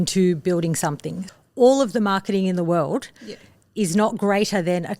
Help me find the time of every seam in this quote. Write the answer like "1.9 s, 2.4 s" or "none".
1.2 s